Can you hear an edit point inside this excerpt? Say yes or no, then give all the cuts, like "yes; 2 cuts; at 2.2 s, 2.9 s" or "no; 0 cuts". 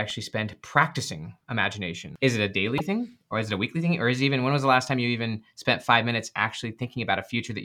yes; 1 cut; at 2.0 s